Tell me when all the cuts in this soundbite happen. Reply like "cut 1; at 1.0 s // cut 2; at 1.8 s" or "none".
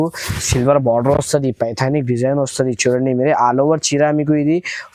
none